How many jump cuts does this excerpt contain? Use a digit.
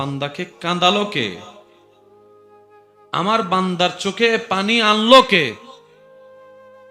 1